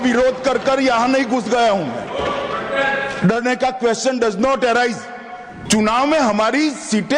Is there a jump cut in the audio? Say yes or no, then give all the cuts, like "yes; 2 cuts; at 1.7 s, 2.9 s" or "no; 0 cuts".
yes; 1 cut; at 5.6 s